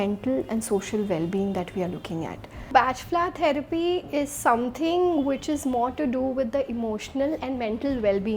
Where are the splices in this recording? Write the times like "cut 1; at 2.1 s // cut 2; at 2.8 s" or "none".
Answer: cut 1; at 2.7 s